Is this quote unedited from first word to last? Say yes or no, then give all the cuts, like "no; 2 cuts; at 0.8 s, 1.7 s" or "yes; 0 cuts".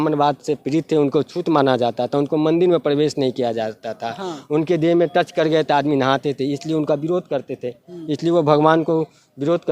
yes; 0 cuts